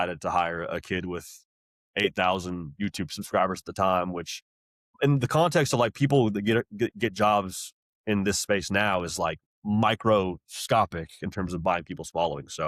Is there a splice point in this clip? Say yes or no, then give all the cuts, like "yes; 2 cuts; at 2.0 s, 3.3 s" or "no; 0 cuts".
no; 0 cuts